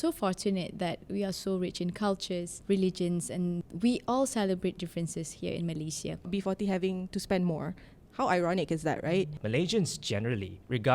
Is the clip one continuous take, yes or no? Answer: no